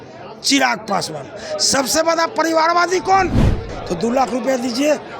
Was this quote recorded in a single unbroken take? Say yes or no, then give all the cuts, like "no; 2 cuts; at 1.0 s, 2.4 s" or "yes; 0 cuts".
no; 1 cut; at 3.7 s